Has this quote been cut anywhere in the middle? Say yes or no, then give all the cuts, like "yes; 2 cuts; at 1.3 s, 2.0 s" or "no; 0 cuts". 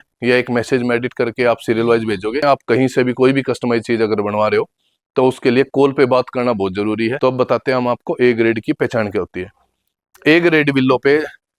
yes; 2 cuts; at 2.4 s, 7.1 s